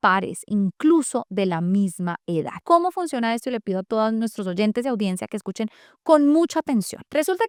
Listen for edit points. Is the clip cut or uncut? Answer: uncut